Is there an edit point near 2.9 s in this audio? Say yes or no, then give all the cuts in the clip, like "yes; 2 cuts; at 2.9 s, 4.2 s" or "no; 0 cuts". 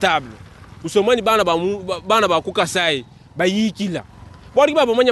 no; 0 cuts